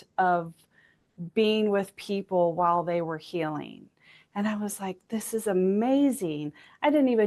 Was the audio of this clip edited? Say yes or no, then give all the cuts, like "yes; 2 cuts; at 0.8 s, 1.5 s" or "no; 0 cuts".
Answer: no; 0 cuts